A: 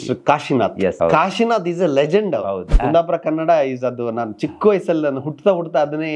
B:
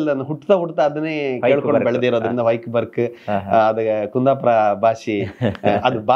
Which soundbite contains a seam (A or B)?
A